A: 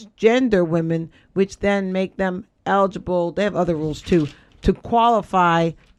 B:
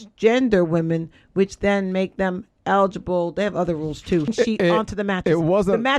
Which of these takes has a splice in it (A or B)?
B